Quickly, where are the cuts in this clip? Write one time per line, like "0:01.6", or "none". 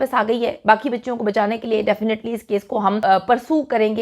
0:03.0